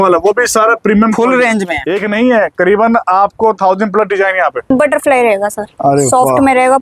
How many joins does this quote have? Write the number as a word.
two